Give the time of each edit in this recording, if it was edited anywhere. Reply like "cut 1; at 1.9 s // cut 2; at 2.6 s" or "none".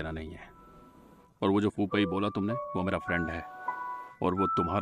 none